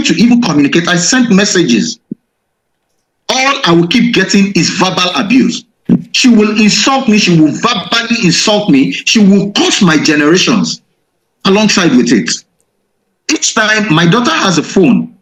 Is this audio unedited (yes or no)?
yes